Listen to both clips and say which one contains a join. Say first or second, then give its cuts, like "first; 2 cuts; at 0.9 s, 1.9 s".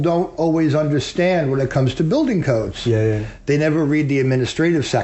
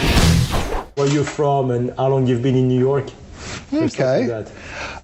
second; 1 cut; at 1.0 s